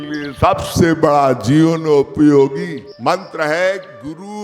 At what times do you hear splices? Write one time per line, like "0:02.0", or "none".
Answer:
0:02.8